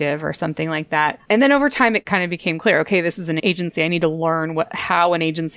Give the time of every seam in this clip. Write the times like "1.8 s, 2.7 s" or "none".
1.2 s, 2.0 s, 3.4 s